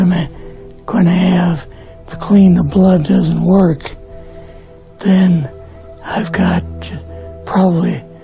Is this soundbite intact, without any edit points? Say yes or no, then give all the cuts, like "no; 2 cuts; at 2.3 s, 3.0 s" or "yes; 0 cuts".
yes; 0 cuts